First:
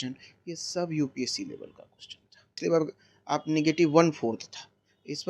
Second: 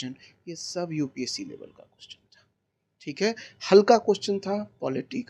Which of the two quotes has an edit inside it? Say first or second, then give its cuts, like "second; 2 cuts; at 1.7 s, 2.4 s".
first; 1 cut; at 2.5 s